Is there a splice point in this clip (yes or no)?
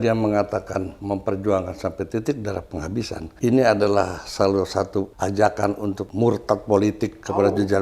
yes